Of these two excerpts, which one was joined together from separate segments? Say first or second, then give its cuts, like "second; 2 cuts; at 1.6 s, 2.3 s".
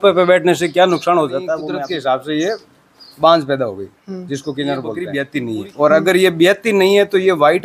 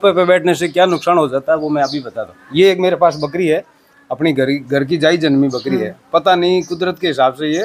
first; 2 cuts; at 1.7 s, 5.2 s